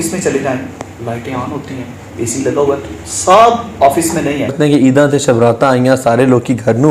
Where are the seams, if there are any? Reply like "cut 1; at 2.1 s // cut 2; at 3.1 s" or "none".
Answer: cut 1; at 4.5 s